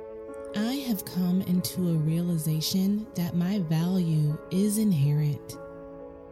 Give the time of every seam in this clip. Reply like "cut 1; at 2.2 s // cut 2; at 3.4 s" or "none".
cut 1; at 5.4 s